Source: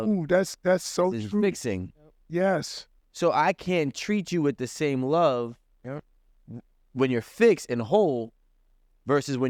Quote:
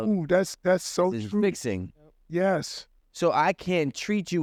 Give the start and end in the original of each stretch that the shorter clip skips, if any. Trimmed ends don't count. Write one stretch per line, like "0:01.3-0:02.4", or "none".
none